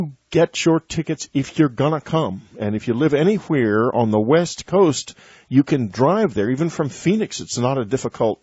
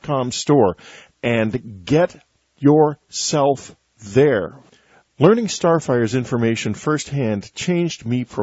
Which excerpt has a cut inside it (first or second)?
first